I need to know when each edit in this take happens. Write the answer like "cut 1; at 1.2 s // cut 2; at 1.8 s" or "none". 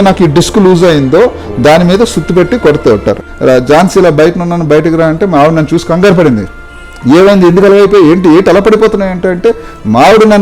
cut 1; at 3.2 s